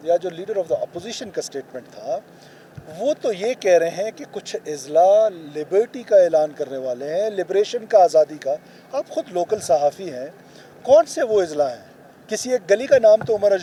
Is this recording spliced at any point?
no; 0 cuts

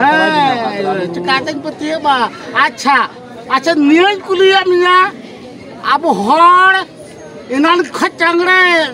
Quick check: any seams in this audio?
no; 0 cuts

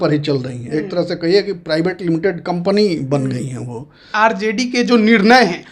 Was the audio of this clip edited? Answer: yes; 1 cut; at 4.1 s

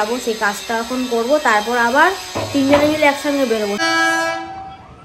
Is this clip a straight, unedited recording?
no; 1 cut; at 3.8 s

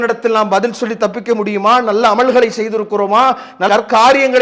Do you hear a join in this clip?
no; 0 cuts

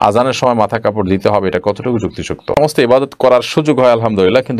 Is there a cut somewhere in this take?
yes; 1 cut; at 2.6 s

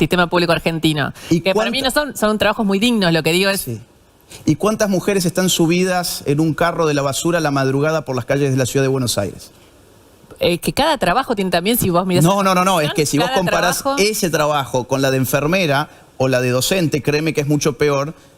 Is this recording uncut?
yes; 0 cuts

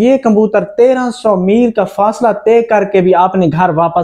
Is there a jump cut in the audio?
no; 0 cuts

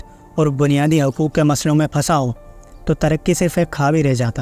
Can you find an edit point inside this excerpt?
no; 0 cuts

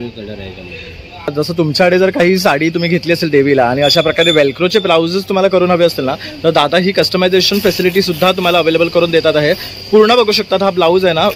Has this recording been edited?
yes; 1 cut; at 1.3 s

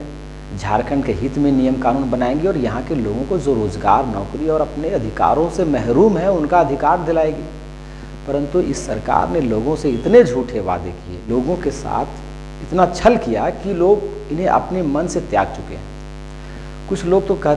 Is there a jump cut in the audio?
yes; 1 cut; at 11.3 s

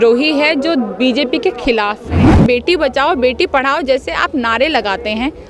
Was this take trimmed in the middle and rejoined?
yes; 1 cut; at 2.2 s

